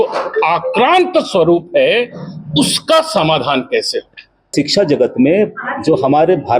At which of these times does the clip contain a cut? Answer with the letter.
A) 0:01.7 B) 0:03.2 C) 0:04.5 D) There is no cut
C